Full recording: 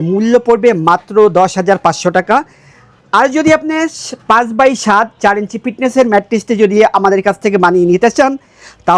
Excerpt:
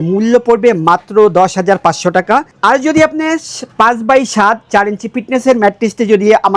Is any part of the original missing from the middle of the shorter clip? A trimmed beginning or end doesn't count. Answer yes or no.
yes